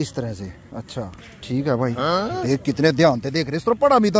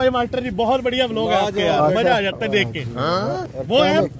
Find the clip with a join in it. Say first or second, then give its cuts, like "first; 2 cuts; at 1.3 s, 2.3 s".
first; 1 cut; at 1.3 s